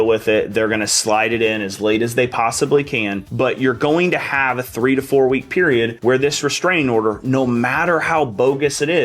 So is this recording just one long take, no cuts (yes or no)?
yes